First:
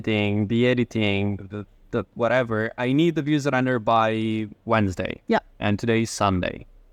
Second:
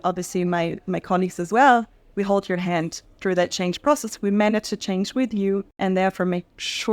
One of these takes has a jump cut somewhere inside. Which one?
second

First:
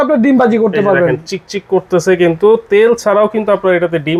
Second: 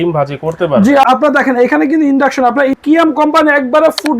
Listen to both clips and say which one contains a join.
second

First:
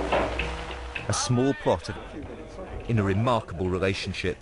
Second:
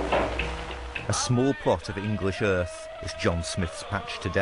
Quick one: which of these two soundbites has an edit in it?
second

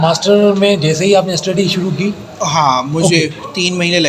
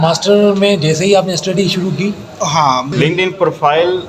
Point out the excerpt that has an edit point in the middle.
second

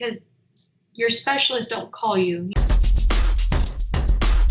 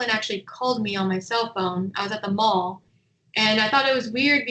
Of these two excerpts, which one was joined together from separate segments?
first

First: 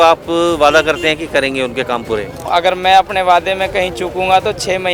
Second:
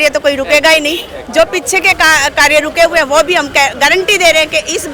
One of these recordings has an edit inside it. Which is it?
first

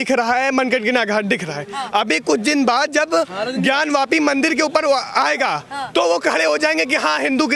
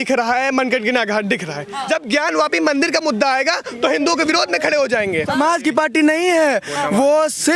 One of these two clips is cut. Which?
second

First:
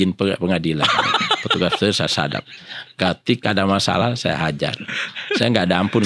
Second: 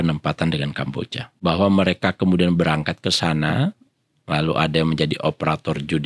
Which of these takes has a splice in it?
second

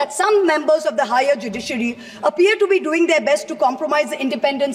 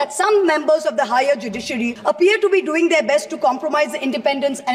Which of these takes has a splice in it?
second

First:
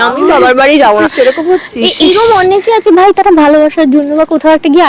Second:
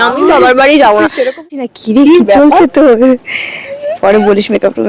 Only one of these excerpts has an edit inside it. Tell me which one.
second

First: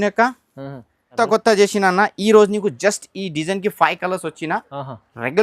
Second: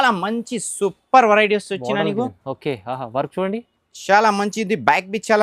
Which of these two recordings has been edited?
first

